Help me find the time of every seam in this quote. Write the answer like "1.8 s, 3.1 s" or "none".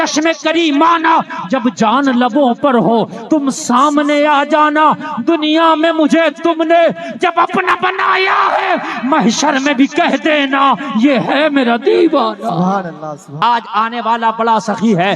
13.4 s